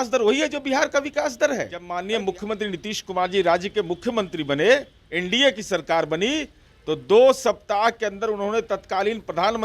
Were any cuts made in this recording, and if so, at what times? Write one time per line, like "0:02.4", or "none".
0:02.0